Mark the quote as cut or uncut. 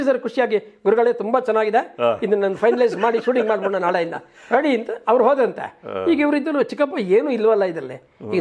uncut